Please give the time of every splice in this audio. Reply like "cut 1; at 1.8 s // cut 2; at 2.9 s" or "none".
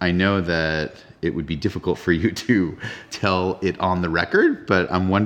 cut 1; at 1.1 s